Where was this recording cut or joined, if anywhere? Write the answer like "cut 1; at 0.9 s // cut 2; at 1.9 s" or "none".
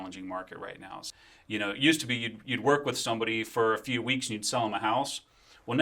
cut 1; at 1.1 s